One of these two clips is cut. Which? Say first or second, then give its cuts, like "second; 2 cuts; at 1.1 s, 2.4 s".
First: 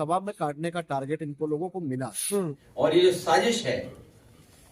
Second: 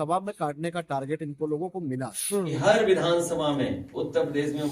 second; 1 cut; at 2.5 s